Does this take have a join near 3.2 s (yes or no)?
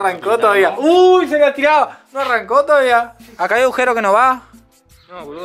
yes